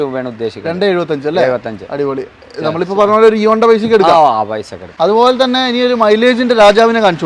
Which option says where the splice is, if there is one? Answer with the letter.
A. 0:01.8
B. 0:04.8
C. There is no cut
B